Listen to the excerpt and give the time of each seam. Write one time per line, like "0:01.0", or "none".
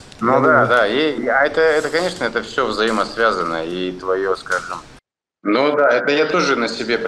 0:05.4